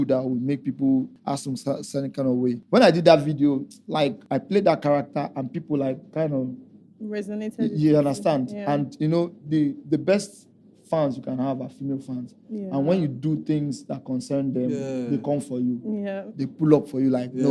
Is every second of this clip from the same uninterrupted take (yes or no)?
no